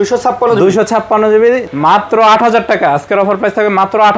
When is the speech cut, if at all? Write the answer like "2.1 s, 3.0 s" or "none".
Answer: 1.7 s